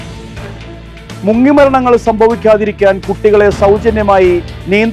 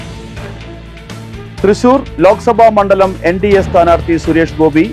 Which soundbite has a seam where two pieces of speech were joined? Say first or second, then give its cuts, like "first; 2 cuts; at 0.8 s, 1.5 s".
second; 1 cut; at 0.9 s